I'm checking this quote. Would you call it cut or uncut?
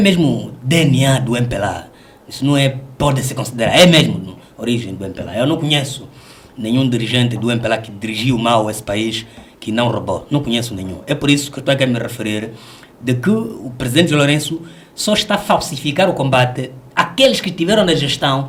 uncut